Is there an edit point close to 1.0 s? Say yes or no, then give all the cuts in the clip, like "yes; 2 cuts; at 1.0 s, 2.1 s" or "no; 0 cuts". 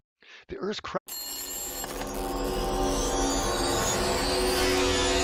no; 0 cuts